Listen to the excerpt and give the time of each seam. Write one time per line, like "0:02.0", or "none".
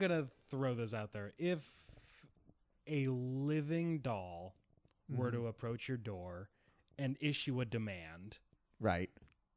none